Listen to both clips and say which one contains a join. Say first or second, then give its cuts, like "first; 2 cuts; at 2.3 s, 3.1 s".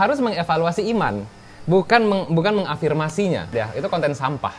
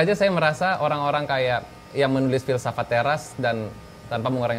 first; 1 cut; at 3.5 s